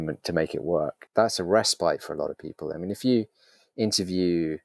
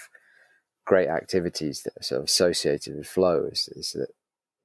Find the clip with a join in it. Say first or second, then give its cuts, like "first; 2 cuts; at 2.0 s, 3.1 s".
first; 1 cut; at 1.0 s